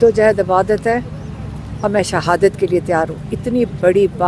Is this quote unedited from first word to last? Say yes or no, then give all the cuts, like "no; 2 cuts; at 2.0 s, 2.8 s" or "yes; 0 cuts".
yes; 0 cuts